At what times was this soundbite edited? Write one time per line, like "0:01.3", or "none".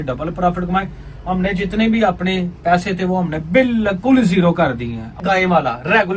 0:05.2